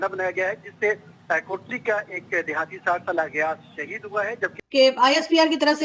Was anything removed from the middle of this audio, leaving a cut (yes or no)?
yes